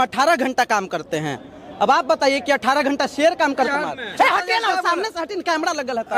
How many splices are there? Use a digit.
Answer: 1